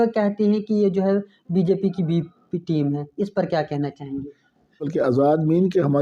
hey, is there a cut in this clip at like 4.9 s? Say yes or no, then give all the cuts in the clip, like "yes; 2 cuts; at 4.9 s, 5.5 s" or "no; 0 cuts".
yes; 1 cut; at 4.9 s